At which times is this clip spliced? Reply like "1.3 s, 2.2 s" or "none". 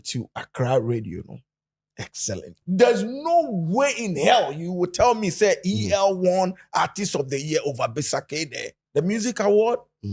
2.6 s, 8.8 s